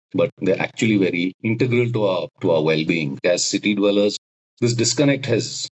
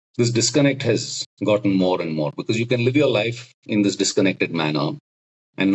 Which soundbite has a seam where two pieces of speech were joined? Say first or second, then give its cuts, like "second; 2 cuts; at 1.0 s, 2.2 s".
first; 3 cuts; at 1.4 s, 2.3 s, 3.2 s